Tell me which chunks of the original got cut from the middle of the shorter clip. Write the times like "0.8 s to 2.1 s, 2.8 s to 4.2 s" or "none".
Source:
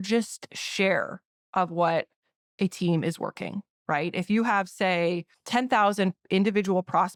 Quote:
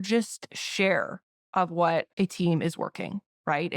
2.1 s to 2.5 s